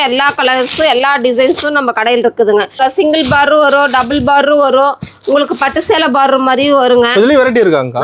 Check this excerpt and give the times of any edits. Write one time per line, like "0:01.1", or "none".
0:02.8